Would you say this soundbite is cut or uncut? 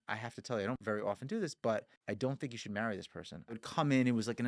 cut